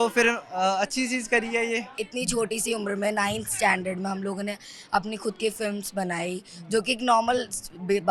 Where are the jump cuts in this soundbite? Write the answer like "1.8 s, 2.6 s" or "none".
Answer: 2.0 s